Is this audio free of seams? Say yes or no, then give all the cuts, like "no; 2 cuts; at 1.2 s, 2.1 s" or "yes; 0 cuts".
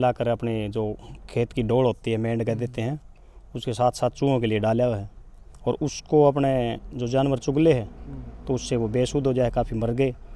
yes; 0 cuts